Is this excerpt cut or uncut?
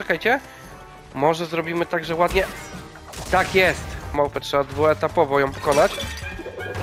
cut